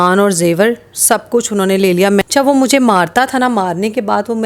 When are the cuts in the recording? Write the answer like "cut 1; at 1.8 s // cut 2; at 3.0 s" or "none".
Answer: cut 1; at 2.2 s